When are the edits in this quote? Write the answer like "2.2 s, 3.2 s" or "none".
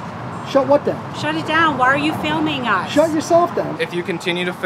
3.7 s